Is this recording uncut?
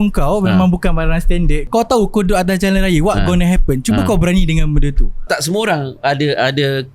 no; 2 cuts; at 1.6 s, 5.2 s

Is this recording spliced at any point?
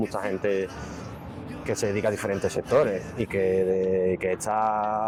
no; 0 cuts

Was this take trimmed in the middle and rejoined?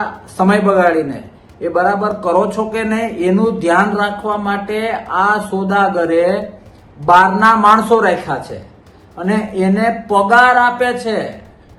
no; 0 cuts

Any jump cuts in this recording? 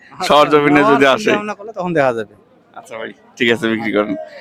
no; 0 cuts

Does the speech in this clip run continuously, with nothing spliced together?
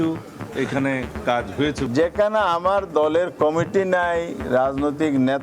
no; 1 cut; at 1.8 s

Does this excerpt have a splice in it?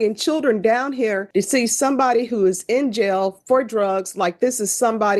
yes; 1 cut; at 1.2 s

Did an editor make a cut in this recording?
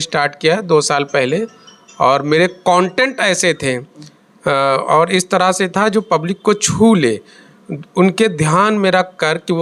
no; 0 cuts

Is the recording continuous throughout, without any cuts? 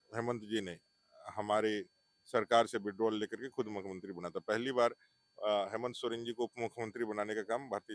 yes; 0 cuts

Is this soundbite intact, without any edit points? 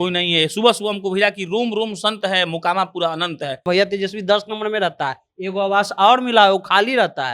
no; 1 cut; at 3.6 s

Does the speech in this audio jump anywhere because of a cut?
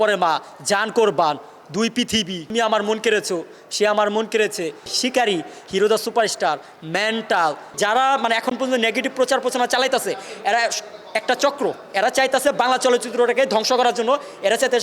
yes; 3 cuts; at 2.4 s, 4.9 s, 7.7 s

